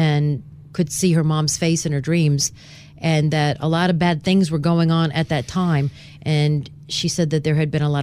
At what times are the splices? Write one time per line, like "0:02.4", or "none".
none